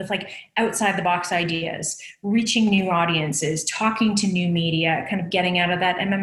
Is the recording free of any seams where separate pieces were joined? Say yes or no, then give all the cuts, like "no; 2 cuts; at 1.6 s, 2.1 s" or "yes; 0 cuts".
yes; 0 cuts